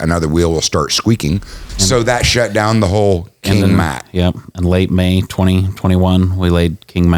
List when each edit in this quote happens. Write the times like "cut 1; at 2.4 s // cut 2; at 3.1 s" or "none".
cut 1; at 1.7 s

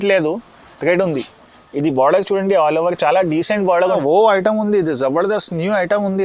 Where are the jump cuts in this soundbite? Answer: cut 1; at 3.9 s

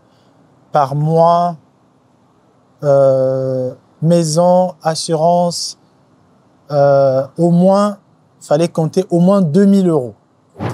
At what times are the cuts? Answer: none

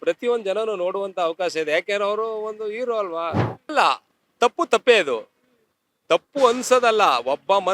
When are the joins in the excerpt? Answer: cut 1; at 3.7 s

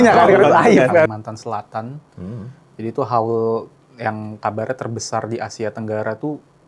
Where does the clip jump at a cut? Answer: cut 1; at 1.1 s

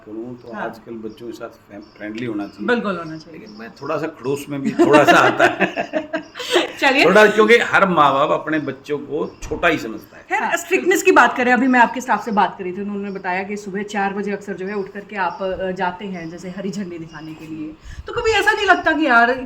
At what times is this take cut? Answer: none

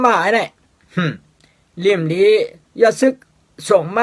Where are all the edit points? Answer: cut 1; at 2.6 s

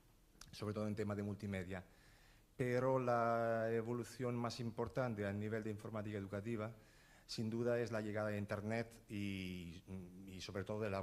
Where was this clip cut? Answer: cut 1; at 0.9 s

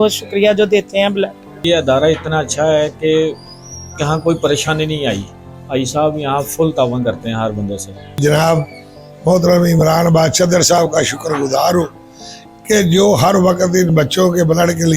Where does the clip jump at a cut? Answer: cut 1; at 1.6 s // cut 2; at 8.2 s

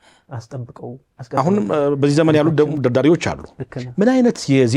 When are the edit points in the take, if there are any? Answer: cut 1; at 1.4 s

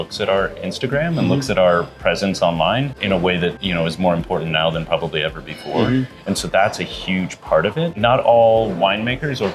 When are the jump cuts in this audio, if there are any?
cut 1; at 3.0 s // cut 2; at 3.6 s // cut 3; at 7.9 s

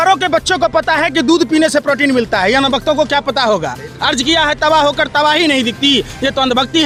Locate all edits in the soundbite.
none

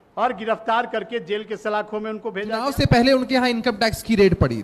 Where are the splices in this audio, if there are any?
cut 1; at 2.6 s

